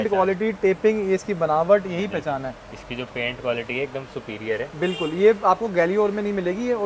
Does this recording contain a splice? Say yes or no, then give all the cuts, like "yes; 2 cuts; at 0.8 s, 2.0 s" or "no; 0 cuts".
no; 0 cuts